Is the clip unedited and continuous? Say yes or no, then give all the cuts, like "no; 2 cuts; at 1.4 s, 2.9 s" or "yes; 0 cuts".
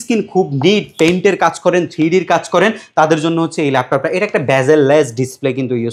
yes; 0 cuts